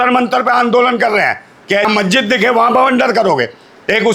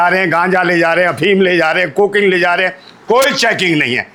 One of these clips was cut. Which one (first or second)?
first